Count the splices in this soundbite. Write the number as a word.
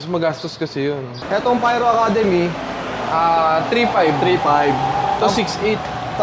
one